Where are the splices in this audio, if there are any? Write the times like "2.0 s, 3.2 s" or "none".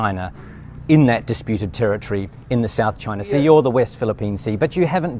3.0 s